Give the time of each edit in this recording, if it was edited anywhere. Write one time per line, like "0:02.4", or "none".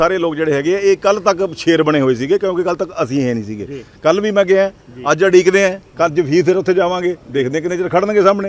none

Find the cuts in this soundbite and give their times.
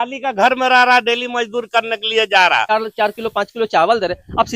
0:02.7

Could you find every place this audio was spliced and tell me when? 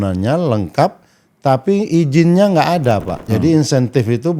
0:03.2

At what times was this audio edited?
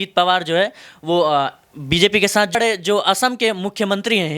0:02.6

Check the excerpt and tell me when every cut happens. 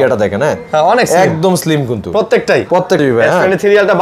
0:03.0

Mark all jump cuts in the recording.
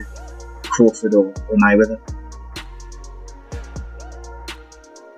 none

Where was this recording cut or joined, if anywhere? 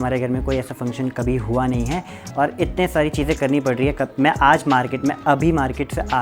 none

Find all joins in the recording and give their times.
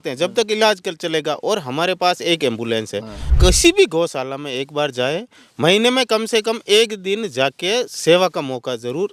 0:03.3

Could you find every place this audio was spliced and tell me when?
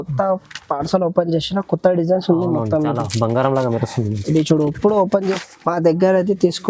0:05.4

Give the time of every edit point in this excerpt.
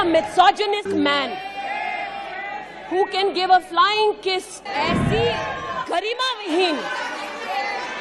0:00.9
0:04.5

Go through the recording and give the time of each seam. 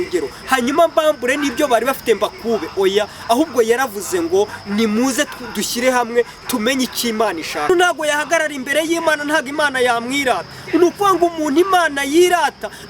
0:07.7

